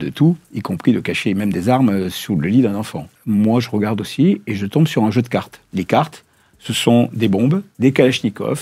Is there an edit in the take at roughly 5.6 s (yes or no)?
yes